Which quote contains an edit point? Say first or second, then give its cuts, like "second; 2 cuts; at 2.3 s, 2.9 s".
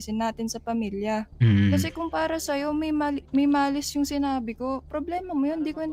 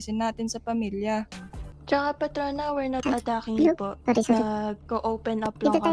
second; 1 cut; at 1.3 s